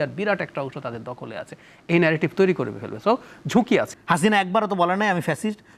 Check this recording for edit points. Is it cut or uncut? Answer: cut